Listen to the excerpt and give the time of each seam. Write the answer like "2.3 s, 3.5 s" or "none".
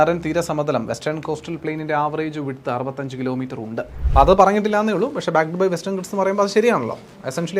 3.9 s